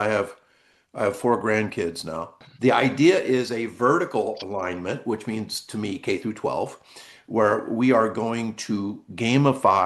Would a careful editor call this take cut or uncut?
cut